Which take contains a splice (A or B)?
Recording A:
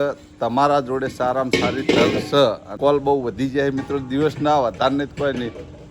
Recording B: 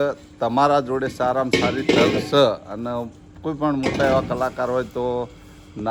A